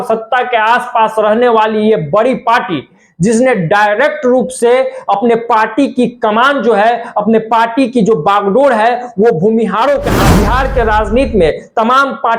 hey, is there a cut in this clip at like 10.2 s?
yes; 1 cut; at 10.2 s

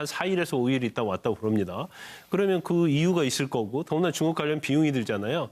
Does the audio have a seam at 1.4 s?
no; 1 cut; at 2.8 s

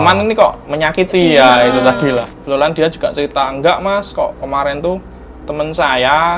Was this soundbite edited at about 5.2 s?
no; 1 cut; at 2.3 s

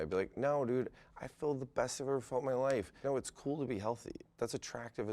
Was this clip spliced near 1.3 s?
no; 2 cuts; at 3.0 s, 4.2 s

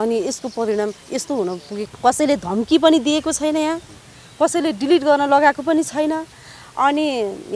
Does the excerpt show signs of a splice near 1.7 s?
yes; 1 cut; at 1.7 s

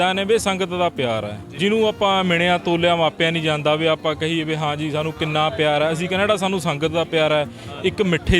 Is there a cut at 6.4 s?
no; 1 cut; at 1.5 s

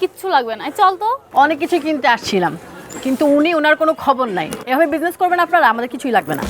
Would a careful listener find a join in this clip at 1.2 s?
yes; 1 cut; at 1.2 s

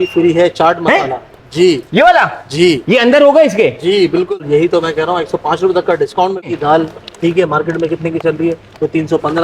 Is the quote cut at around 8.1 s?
no; 2 cuts; at 4.3 s, 6.5 s

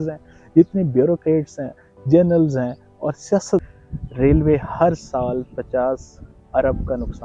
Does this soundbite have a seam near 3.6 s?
yes; 1 cut; at 3.6 s

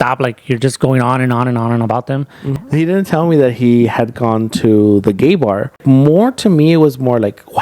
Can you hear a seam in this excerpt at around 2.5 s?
yes; 2 cuts; at 2.5 s, 5.8 s

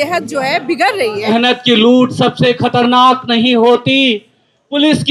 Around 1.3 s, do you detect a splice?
yes; 1 cut; at 1.3 s

